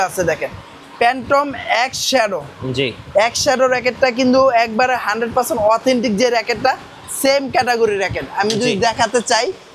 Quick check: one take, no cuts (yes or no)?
yes